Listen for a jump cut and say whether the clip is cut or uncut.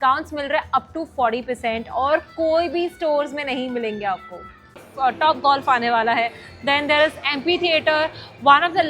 cut